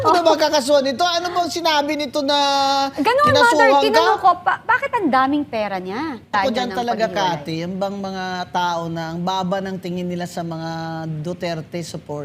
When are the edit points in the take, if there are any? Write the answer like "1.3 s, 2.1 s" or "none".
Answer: 6.3 s